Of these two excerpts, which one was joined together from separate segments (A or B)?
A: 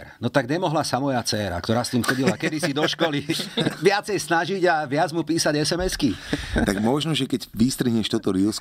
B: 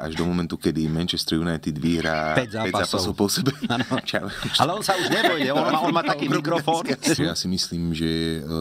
B